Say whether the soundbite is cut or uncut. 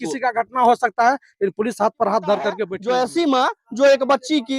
cut